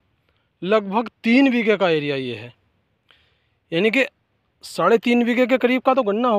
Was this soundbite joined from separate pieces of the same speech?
no; 0 cuts

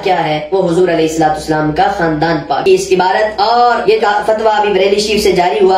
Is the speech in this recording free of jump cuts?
no; 1 cut; at 2.6 s

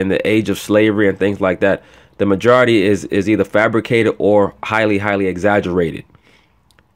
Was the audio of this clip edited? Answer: no; 0 cuts

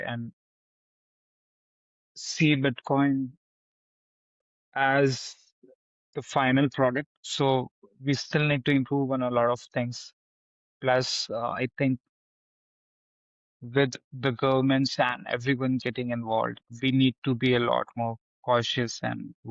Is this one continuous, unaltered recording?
no; 2 cuts; at 7.2 s, 16.6 s

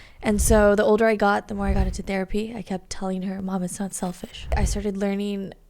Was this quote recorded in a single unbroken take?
no; 1 cut; at 4.6 s

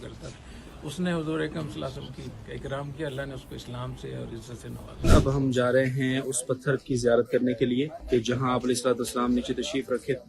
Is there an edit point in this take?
yes; 2 cuts; at 5.1 s, 8.0 s

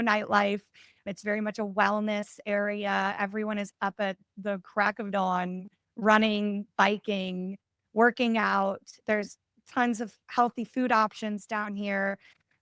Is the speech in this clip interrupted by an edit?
no; 0 cuts

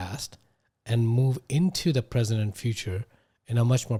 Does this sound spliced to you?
no; 0 cuts

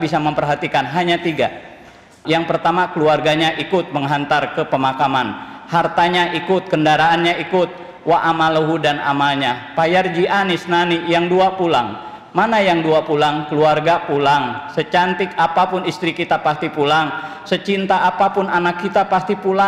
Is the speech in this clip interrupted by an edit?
yes; 1 cut; at 2.2 s

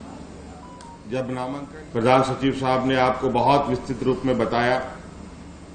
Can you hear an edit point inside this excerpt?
yes; 1 cut; at 1.6 s

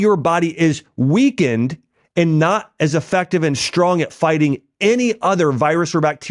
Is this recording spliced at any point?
no; 0 cuts

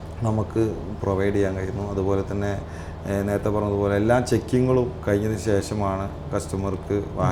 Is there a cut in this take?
no; 0 cuts

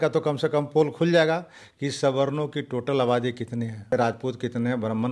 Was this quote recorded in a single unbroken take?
no; 1 cut; at 3.9 s

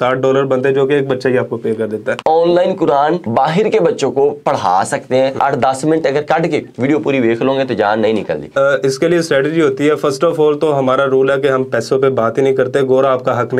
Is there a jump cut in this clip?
yes; 3 cuts; at 2.2 s, 5.4 s, 8.5 s

